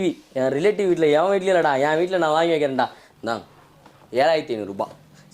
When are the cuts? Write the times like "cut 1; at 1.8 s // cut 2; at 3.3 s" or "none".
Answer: cut 1; at 3.0 s